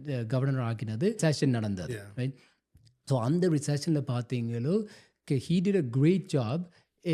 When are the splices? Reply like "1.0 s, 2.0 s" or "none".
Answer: 1.2 s

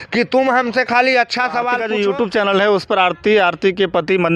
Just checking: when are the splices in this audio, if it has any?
1.7 s

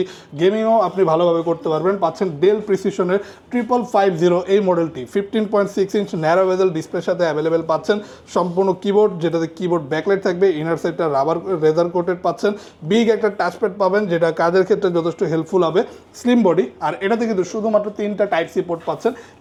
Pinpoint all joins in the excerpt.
none

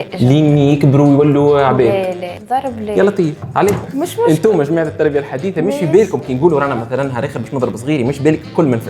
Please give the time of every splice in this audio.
2.3 s, 3.9 s

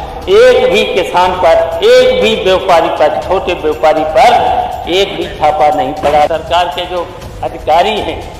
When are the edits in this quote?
6.3 s

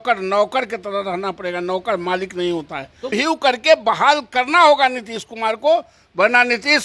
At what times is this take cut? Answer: 3.1 s

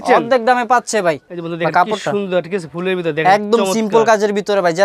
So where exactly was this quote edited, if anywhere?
1.3 s

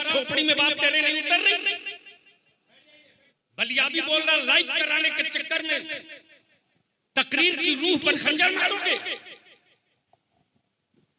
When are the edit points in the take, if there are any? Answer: 3.3 s

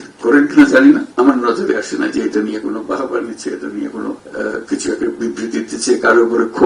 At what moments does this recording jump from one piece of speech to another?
1.1 s, 4.2 s

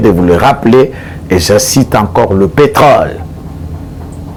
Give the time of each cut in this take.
none

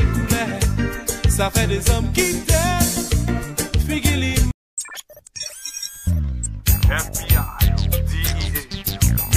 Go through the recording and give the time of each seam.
4.5 s

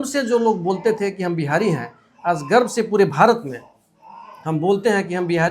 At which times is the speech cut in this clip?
none

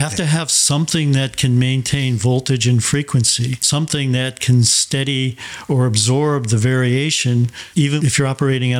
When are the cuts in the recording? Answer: 3.6 s, 7.6 s

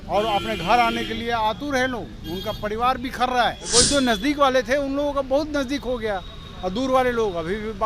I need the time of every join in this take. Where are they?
3.6 s

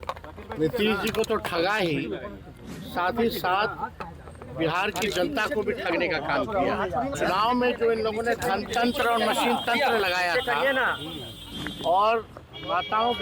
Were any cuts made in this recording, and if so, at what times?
7.2 s

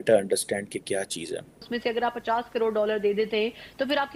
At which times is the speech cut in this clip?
1.7 s

